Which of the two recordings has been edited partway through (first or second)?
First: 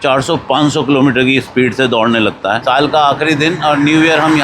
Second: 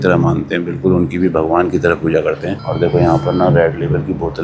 first